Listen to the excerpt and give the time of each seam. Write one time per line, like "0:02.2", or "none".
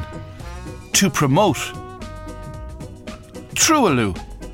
none

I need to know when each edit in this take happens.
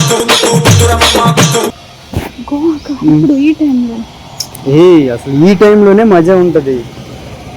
0:01.7

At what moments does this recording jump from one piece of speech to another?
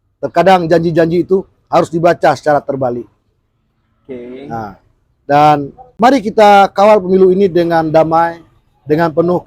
0:05.9

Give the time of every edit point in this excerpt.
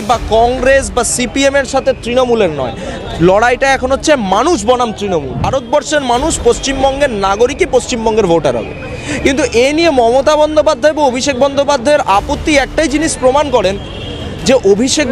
0:05.4

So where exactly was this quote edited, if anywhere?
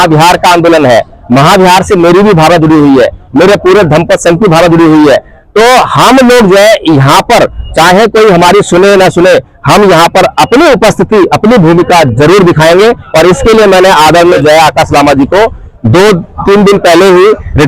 0:14.4

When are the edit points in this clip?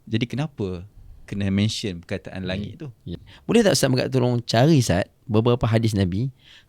0:03.3

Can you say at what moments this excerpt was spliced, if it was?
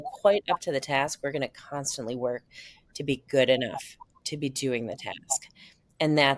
none

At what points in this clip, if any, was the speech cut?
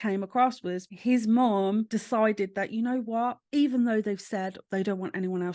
0:00.9
0:01.9
0:03.4

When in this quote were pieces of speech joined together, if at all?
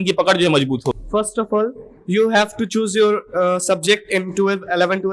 0:01.0

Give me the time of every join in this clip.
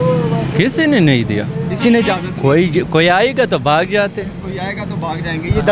none

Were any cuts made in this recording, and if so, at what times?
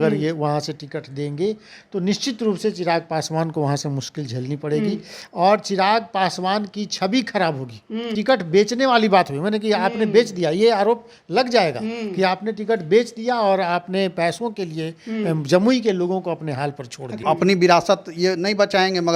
0:08.1
0:17.2

